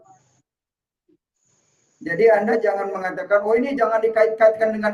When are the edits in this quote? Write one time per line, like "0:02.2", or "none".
none